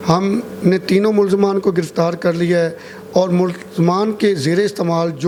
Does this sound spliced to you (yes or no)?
no